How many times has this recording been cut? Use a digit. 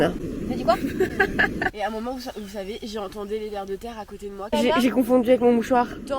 2